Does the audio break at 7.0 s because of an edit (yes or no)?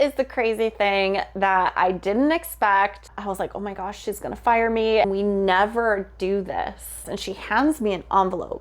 yes